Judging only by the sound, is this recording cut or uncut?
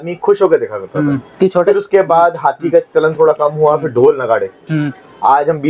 uncut